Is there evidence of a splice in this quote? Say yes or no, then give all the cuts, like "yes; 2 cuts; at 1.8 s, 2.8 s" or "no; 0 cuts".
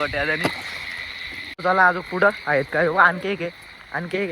yes; 1 cut; at 1.6 s